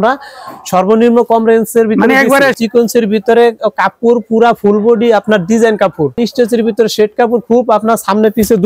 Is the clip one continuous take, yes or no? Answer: no